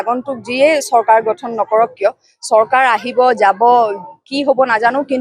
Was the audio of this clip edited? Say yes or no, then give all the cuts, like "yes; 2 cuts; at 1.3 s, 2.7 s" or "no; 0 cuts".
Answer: no; 0 cuts